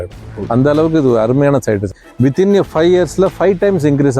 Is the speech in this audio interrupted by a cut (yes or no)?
yes